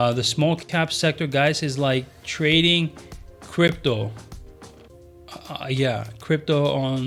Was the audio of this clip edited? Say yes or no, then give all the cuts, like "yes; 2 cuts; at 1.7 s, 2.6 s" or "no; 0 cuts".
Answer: no; 0 cuts